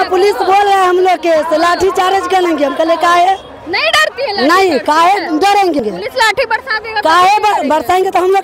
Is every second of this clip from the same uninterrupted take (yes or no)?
no